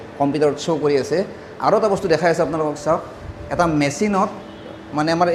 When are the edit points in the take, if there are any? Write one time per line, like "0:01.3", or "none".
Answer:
none